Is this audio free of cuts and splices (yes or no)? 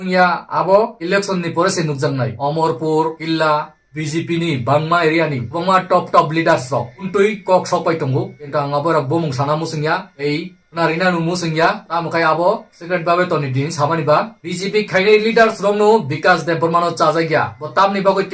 yes